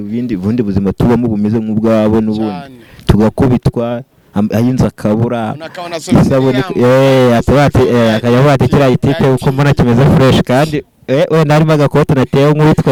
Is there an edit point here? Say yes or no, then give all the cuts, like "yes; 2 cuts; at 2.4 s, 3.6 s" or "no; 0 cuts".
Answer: no; 0 cuts